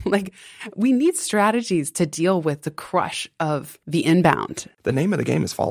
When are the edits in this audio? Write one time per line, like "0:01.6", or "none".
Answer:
0:03.8
0:04.6